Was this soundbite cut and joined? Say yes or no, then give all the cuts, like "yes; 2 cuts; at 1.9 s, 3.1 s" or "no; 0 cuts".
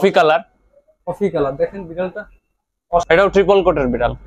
yes; 1 cut; at 3.2 s